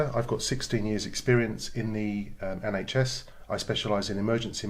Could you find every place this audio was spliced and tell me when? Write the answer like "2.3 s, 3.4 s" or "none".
3.2 s